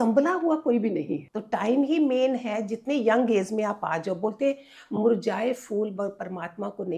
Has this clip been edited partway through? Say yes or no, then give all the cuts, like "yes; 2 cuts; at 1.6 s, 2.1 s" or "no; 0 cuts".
yes; 1 cut; at 1.2 s